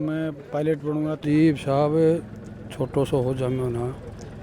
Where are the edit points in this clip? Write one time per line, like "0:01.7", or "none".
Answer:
0:01.2